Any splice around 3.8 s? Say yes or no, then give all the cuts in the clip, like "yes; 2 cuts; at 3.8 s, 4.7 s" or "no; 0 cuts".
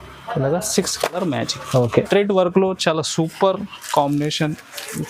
no; 1 cut; at 2.1 s